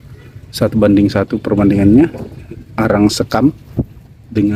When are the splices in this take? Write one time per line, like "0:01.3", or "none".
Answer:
none